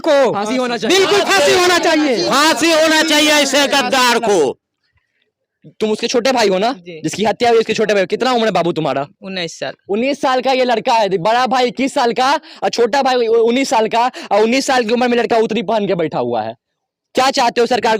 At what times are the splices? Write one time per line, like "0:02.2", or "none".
none